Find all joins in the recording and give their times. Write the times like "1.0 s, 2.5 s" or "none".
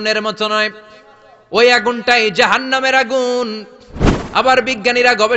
none

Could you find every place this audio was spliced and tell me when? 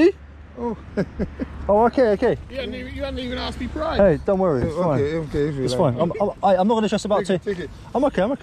none

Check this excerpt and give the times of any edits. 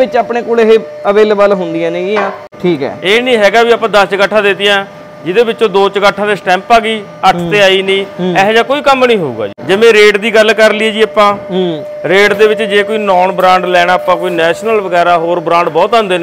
2.5 s, 9.5 s

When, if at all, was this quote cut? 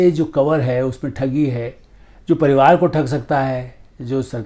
none

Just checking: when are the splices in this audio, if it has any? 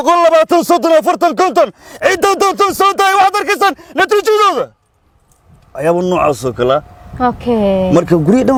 none

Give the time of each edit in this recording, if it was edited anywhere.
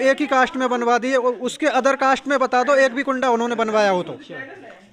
none

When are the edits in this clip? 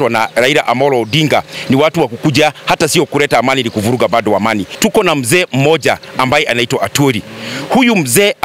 4.7 s

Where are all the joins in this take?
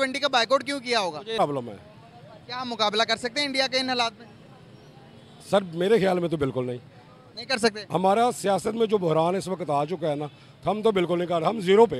1.4 s

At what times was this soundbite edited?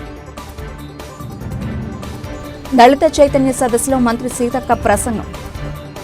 none

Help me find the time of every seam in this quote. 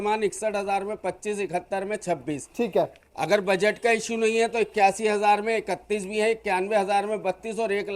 none

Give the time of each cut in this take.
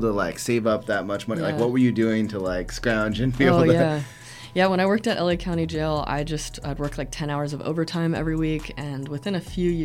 none

